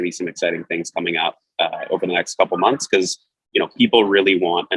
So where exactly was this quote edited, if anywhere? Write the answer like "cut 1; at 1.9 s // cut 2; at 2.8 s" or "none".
none